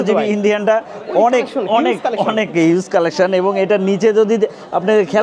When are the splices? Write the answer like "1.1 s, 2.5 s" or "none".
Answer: none